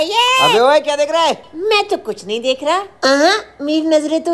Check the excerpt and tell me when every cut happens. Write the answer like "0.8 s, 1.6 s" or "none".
none